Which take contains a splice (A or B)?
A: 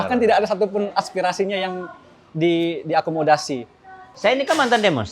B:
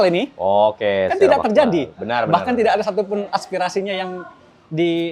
A